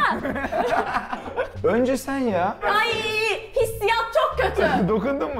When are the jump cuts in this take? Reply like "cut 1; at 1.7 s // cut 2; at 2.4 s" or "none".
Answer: none